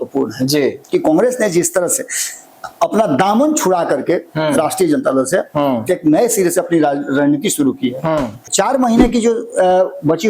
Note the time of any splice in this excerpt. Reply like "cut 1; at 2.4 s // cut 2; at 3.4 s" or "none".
cut 1; at 8.5 s